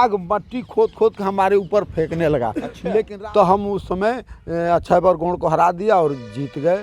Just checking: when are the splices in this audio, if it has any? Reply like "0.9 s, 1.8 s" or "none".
3.1 s